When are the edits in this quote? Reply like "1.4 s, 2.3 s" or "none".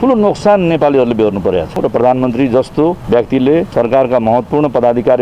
1.8 s, 3.0 s, 3.7 s

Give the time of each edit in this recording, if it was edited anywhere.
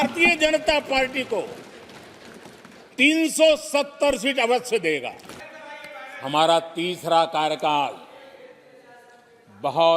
5.4 s

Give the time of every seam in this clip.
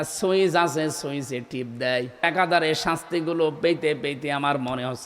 2.2 s

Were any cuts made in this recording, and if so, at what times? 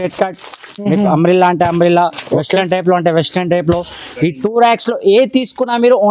none

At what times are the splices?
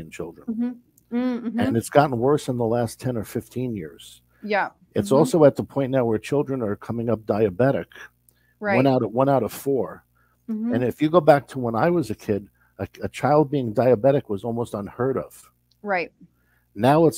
none

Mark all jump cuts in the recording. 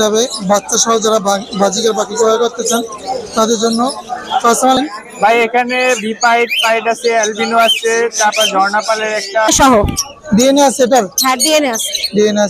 4.8 s, 9.5 s

